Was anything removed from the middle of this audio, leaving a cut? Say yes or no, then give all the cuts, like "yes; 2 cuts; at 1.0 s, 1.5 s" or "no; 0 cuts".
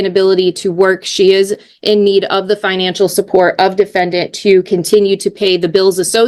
no; 0 cuts